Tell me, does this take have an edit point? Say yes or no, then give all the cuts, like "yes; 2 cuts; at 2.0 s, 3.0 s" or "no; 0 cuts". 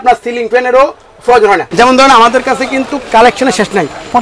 yes; 1 cut; at 1.7 s